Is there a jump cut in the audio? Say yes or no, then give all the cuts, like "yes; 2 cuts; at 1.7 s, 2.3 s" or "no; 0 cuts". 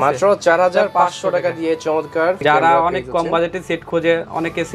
yes; 1 cut; at 2.4 s